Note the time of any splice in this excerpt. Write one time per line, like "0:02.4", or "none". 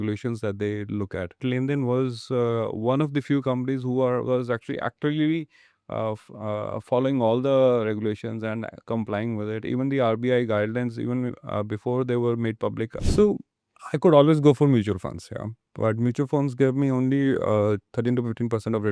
0:01.4
0:13.0
0:17.9